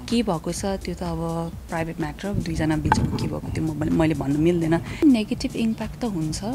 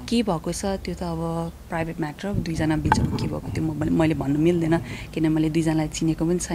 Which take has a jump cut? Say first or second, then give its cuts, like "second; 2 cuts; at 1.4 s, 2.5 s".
first; 1 cut; at 5.0 s